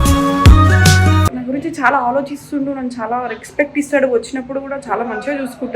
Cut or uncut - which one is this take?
cut